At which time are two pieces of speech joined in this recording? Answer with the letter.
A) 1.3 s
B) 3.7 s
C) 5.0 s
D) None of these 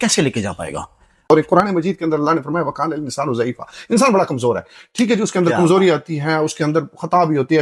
A